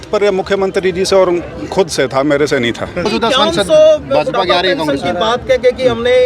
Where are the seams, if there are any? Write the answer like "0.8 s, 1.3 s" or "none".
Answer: 3.1 s

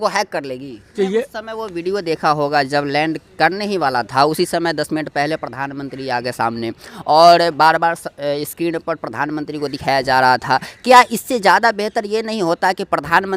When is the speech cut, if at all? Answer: 0.9 s

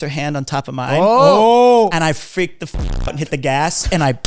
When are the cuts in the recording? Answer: 1.9 s

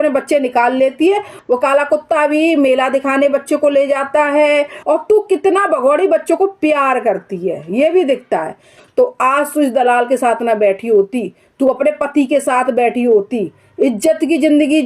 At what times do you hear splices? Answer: 1.3 s, 4.7 s, 8.8 s

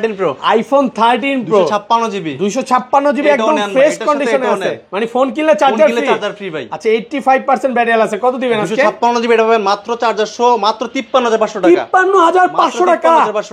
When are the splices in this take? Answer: none

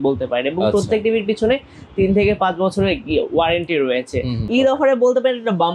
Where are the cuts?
4.6 s

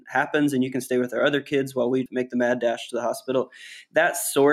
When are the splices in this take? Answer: none

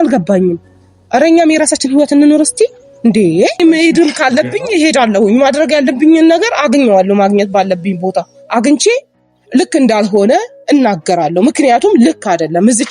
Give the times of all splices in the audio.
3.8 s

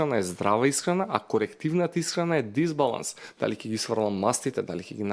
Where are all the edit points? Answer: none

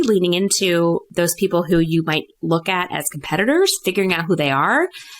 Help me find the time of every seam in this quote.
1.1 s

